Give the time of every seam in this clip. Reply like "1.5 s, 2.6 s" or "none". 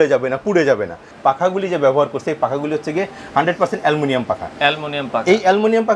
1.1 s